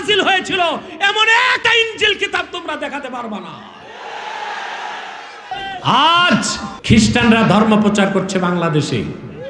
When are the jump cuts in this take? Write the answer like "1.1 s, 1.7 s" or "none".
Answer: 1.6 s, 5.5 s, 6.7 s